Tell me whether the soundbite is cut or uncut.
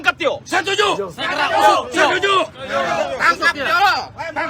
uncut